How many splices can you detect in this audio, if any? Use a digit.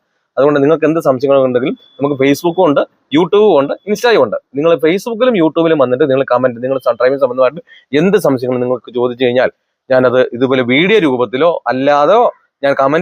0